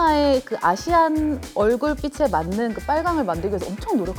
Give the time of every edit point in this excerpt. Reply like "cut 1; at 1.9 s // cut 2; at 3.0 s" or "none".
none